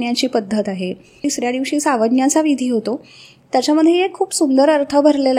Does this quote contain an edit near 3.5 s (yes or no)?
no